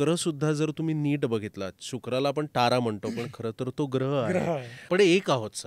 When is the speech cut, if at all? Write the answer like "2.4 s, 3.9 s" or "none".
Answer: 4.7 s